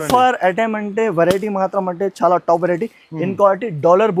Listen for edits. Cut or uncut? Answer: uncut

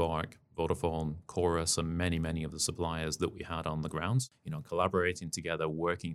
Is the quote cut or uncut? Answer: cut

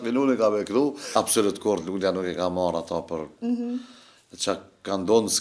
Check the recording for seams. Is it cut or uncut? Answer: cut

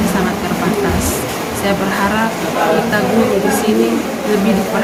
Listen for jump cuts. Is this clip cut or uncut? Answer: uncut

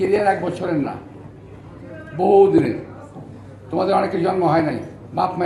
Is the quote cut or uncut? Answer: uncut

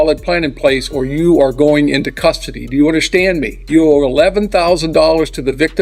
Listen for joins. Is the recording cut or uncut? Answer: cut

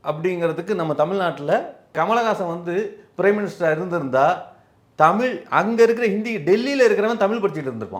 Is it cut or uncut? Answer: cut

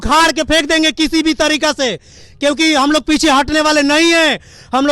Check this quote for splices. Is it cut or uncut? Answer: uncut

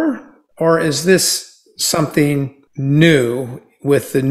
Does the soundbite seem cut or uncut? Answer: cut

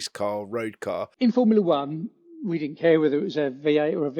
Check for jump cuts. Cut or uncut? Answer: cut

